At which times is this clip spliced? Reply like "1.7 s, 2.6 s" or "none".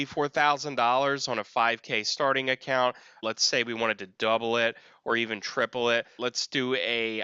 3.2 s, 6.2 s